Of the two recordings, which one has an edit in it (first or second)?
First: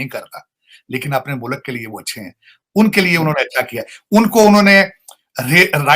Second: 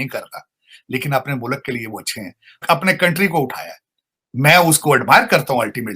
second